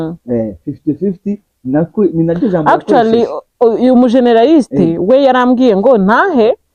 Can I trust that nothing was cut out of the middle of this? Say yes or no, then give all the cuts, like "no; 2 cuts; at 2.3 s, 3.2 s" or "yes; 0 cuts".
yes; 0 cuts